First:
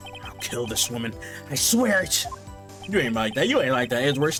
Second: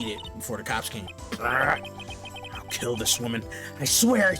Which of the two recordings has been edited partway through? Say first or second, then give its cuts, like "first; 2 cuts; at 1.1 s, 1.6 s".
second; 1 cut; at 1.1 s